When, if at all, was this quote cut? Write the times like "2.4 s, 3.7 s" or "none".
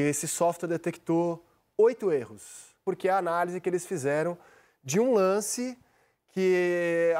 2.8 s